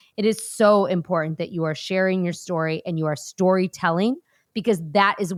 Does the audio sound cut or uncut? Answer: uncut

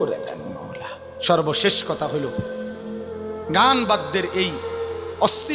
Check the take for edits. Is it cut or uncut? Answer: uncut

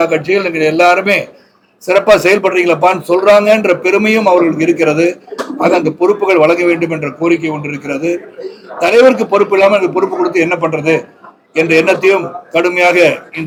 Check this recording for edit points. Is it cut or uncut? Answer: uncut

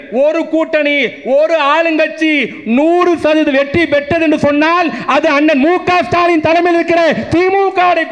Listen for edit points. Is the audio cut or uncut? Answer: uncut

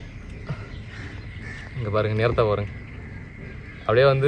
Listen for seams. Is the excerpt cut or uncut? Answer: uncut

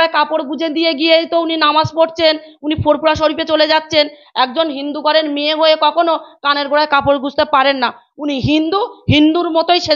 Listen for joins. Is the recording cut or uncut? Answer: uncut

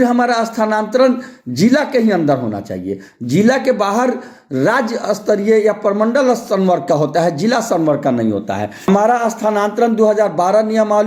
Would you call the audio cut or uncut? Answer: cut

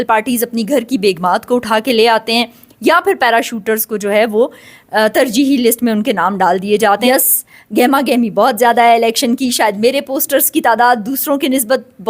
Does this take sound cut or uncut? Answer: cut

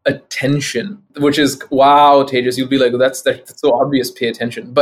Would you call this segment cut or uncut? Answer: cut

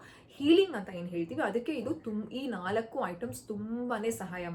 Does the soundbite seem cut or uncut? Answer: uncut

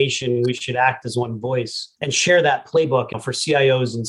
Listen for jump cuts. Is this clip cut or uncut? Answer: cut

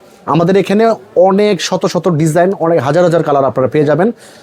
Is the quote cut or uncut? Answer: uncut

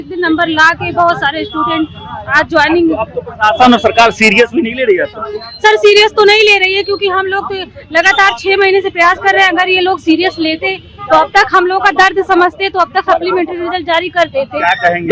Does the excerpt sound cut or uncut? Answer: uncut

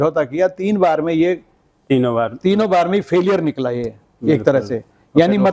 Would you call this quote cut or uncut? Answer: uncut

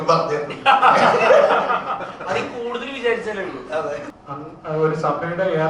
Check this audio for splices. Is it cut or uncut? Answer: cut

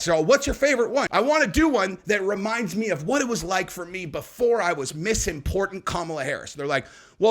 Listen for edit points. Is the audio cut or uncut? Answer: cut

